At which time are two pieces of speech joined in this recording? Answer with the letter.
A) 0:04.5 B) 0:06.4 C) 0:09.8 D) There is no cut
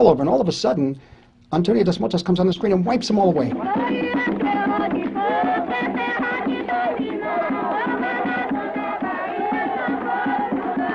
A